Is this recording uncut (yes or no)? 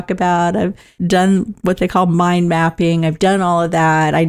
yes